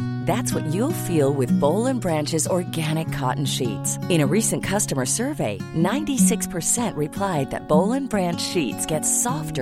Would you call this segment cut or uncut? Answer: uncut